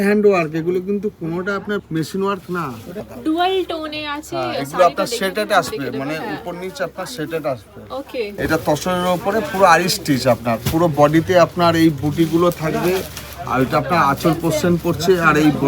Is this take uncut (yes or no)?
no